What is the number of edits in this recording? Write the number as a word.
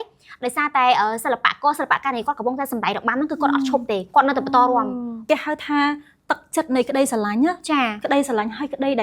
one